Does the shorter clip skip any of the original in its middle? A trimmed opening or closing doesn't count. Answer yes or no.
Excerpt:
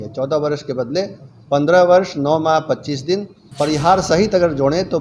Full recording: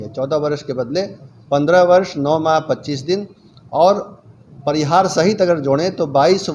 yes